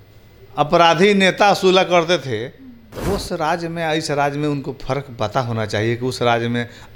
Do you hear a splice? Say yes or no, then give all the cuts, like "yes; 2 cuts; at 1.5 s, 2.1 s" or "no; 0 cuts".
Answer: no; 0 cuts